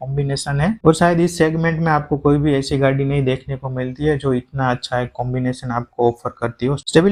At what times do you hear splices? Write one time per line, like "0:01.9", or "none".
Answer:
none

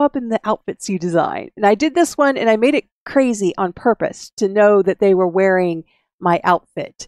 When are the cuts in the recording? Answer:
0:03.0

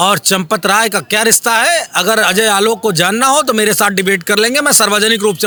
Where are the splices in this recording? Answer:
none

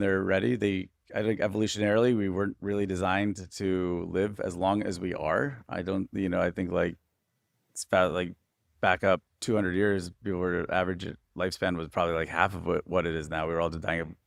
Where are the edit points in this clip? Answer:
none

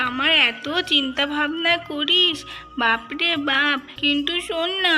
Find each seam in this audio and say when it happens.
0:03.9

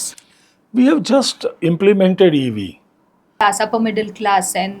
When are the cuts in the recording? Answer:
0:03.4

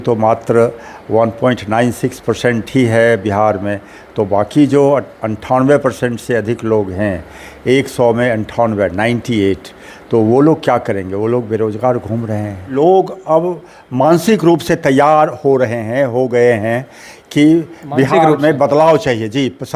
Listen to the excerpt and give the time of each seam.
0:12.7

